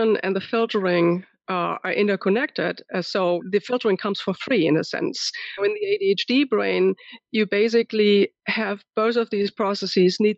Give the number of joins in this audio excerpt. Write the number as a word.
two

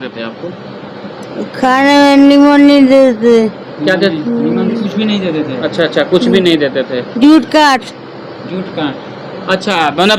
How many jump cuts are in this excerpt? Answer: zero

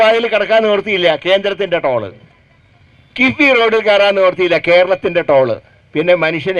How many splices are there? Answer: zero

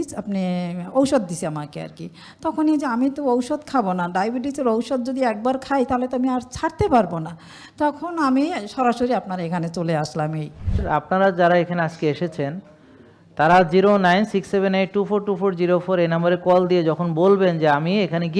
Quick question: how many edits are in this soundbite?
one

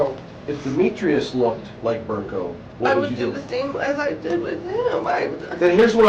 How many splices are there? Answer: two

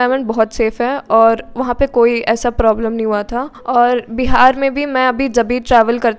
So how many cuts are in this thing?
one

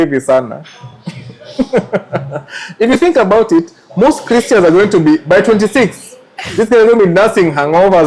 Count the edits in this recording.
zero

